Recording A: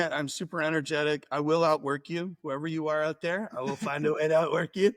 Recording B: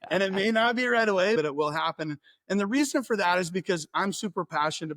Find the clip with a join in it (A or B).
B